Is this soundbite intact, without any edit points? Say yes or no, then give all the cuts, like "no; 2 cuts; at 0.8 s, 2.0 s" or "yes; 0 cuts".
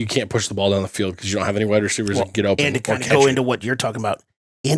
yes; 0 cuts